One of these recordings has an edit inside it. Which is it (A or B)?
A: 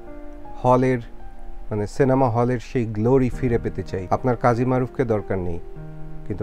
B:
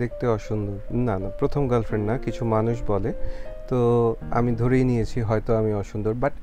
A